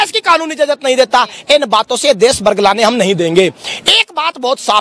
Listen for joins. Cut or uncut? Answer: uncut